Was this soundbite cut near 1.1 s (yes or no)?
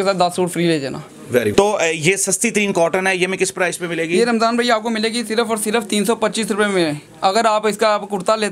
no